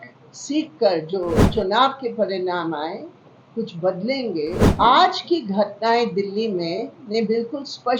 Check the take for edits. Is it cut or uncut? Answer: cut